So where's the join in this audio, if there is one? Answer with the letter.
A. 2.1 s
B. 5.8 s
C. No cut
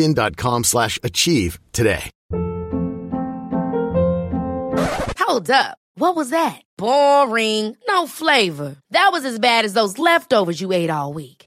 A